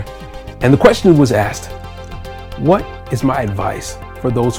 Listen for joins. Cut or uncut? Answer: uncut